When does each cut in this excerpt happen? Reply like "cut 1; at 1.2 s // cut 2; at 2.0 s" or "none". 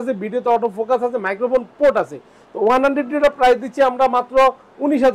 none